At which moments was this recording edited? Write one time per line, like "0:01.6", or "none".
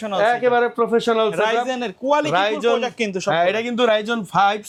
none